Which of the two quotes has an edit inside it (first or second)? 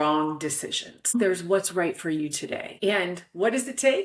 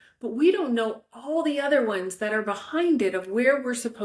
first